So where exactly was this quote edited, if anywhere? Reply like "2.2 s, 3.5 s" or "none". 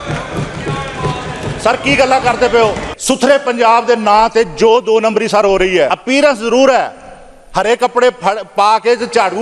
2.9 s, 5.9 s